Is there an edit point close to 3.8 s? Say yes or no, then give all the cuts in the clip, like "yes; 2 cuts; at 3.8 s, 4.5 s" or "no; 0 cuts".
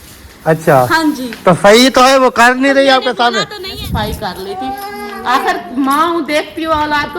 yes; 1 cut; at 3.8 s